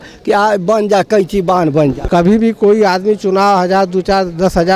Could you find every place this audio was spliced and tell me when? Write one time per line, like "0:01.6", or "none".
0:02.0